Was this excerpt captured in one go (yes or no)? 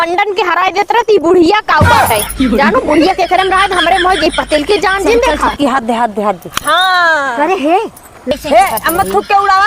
no